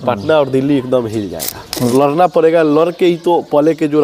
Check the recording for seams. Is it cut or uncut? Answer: cut